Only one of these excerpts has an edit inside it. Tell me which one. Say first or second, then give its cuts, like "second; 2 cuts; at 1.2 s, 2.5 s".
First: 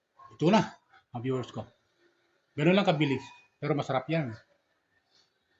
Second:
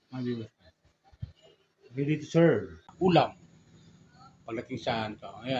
second; 1 cut; at 2.9 s